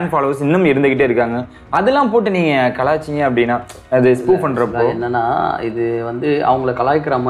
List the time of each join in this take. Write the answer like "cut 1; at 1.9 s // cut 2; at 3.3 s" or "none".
none